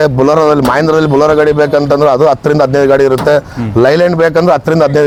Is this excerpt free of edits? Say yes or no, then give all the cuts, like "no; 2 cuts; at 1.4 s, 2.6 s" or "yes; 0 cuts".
yes; 0 cuts